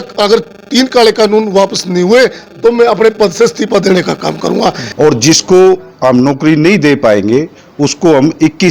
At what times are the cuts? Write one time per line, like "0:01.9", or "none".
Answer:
0:04.8